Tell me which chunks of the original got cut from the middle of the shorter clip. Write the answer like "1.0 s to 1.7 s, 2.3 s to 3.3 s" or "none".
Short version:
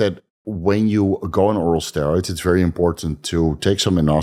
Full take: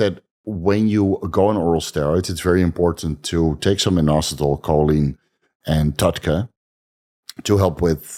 none